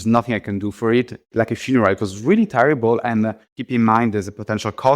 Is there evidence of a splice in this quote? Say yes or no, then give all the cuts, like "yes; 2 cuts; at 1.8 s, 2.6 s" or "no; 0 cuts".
yes; 2 cuts; at 1.2 s, 3.4 s